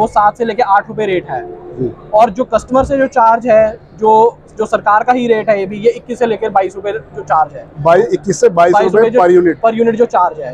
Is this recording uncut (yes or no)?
yes